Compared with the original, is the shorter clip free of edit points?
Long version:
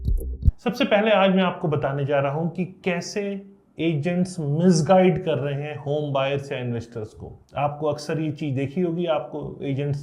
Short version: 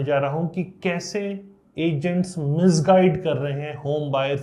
yes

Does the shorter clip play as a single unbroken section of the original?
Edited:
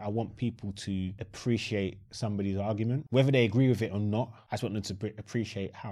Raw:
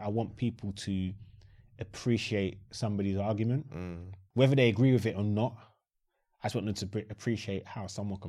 no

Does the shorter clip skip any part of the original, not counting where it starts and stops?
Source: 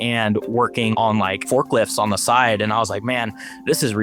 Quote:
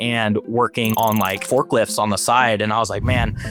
no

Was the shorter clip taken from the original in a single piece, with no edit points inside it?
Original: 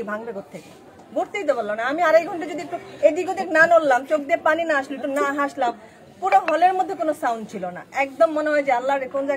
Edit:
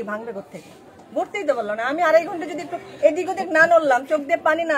yes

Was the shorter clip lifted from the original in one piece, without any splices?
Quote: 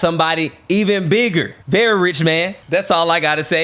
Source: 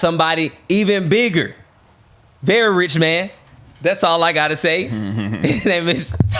no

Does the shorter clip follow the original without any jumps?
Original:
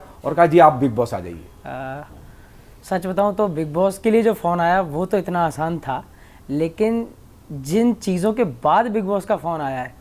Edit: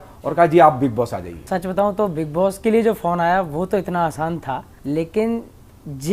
no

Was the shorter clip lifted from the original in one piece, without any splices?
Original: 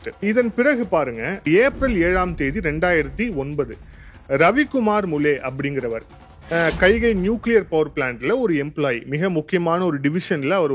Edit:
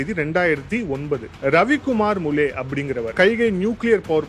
no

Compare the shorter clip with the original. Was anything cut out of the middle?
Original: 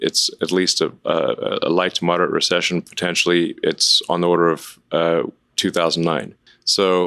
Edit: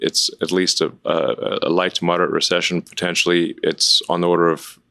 no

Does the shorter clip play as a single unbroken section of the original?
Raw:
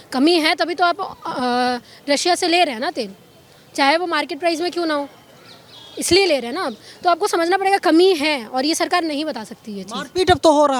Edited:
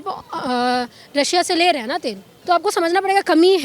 no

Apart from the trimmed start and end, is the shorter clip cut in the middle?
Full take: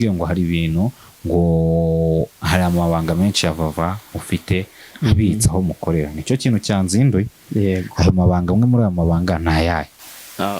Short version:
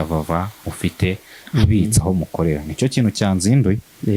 no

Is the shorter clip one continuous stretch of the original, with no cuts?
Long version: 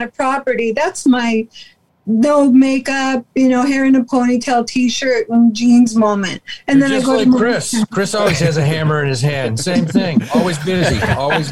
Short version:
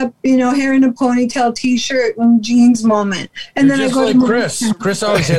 yes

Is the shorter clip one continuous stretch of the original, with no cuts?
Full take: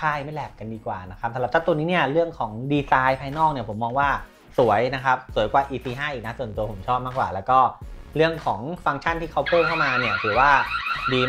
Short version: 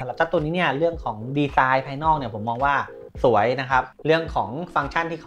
no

